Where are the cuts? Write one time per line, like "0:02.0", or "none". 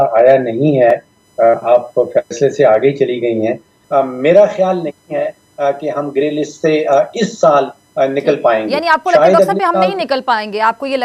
0:03.7